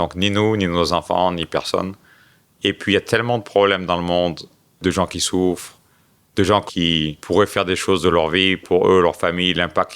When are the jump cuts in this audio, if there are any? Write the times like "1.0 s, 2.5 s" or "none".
4.8 s, 6.7 s